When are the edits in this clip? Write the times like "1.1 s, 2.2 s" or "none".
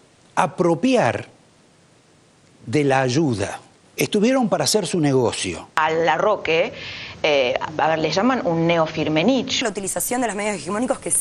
5.7 s, 9.6 s